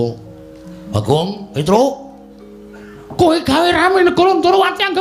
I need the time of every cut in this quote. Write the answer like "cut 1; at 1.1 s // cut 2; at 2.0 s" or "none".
none